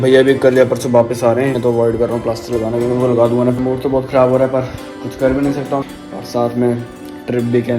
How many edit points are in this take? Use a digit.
3